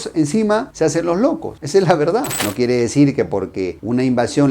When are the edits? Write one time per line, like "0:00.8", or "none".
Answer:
0:02.4